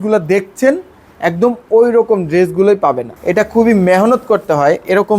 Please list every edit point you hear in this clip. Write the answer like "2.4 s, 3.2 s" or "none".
3.1 s